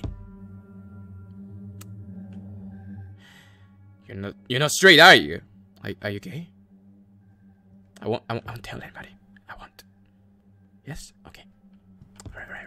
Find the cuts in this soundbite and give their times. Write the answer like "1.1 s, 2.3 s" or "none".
3.2 s